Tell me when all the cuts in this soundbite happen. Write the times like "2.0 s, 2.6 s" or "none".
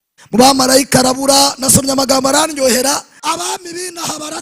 3.1 s